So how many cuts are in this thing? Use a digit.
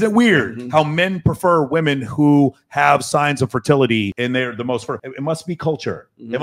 0